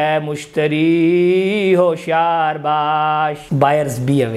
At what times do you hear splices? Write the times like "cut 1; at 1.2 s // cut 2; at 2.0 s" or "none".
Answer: cut 1; at 3.4 s